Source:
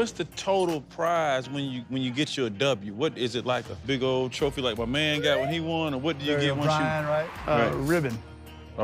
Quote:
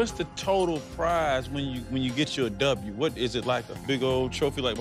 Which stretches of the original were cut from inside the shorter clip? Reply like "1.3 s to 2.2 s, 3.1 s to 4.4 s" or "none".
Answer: none